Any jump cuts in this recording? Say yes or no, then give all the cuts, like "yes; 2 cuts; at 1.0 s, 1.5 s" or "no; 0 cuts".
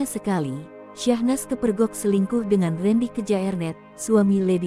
no; 0 cuts